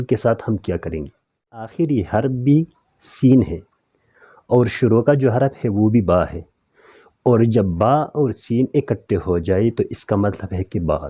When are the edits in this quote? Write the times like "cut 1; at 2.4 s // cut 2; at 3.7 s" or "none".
cut 1; at 1.7 s